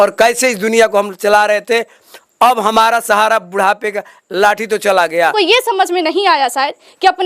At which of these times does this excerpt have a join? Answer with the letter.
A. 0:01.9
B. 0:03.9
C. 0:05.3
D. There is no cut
C